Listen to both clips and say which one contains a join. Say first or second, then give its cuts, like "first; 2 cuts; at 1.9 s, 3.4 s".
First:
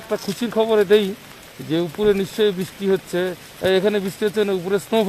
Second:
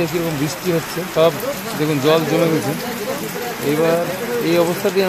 second; 1 cut; at 1.0 s